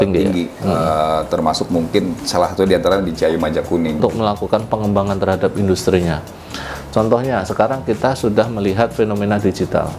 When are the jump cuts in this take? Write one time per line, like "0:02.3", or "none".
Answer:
0:04.0